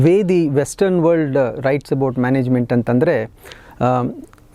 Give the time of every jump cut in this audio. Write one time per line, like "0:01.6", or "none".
none